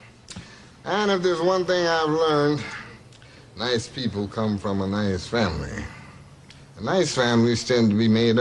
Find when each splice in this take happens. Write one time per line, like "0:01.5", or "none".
0:07.1